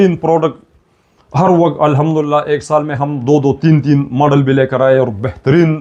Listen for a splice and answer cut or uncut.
uncut